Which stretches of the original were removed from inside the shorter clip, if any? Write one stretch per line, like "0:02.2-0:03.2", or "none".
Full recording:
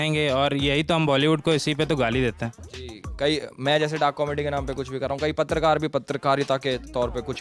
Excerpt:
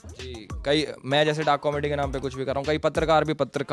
none